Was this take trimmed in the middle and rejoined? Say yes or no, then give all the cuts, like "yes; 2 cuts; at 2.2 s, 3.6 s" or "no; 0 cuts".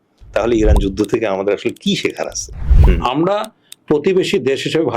yes; 1 cut; at 2.7 s